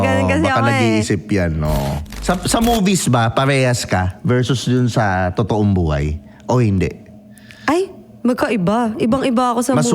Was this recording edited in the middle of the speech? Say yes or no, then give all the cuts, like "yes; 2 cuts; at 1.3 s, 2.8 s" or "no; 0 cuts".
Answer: yes; 1 cut; at 2.1 s